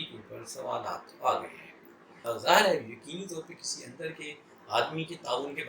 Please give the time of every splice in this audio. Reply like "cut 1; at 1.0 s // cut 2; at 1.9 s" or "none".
cut 1; at 2.3 s